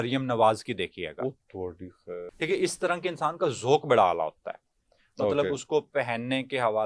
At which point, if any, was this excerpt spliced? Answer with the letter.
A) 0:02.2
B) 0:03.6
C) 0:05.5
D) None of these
A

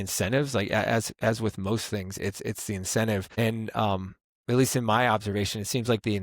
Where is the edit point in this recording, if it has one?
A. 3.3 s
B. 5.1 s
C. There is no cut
A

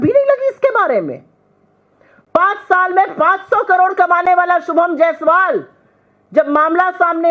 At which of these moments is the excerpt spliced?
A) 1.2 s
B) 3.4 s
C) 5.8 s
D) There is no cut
D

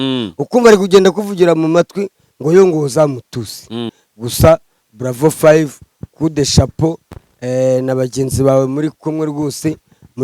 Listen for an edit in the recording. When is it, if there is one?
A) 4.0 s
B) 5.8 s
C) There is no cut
A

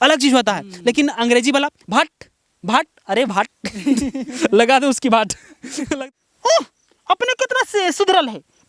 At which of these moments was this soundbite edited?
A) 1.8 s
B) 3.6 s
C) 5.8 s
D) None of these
C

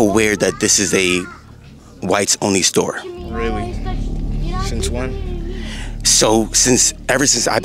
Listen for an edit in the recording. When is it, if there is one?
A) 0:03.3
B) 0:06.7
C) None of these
C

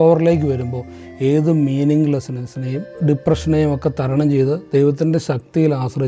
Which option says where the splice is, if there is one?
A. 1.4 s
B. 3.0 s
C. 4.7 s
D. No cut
B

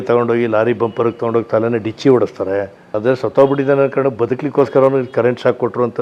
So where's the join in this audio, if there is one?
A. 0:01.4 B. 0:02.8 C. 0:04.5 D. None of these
B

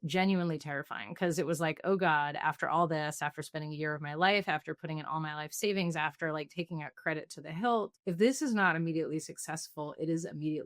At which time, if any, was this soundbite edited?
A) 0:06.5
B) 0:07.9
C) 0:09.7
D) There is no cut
B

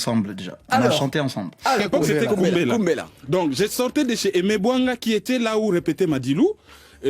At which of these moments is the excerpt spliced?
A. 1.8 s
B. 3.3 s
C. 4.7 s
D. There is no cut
A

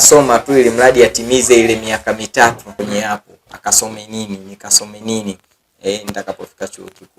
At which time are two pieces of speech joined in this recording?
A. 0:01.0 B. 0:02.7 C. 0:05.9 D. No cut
B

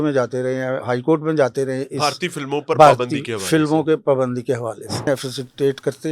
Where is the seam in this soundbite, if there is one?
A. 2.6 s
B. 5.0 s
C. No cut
B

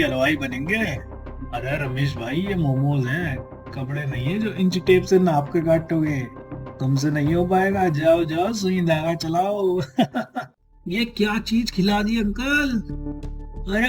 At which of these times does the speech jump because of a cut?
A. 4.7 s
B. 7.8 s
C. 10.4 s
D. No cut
C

